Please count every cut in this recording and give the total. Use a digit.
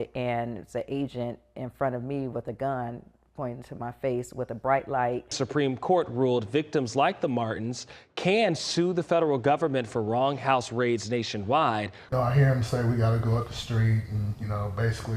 2